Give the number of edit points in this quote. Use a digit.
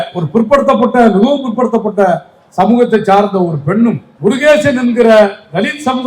1